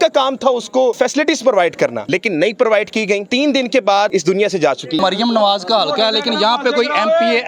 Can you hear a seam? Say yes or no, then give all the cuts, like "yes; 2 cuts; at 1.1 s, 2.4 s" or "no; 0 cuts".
yes; 4 cuts; at 1.0 s, 2.0 s, 3.3 s, 5.0 s